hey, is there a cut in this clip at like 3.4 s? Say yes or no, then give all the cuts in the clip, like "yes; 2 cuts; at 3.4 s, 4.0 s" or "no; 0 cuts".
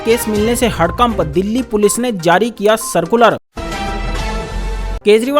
yes; 1 cut; at 3.4 s